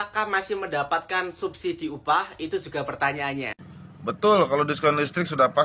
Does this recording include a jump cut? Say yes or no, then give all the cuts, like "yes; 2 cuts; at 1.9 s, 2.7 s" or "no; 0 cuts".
yes; 1 cut; at 3.6 s